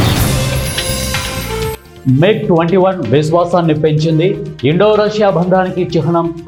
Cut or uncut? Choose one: uncut